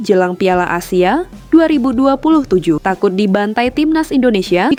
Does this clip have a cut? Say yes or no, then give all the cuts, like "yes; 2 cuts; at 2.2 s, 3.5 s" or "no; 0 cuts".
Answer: no; 0 cuts